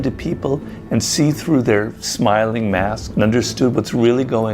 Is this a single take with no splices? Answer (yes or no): no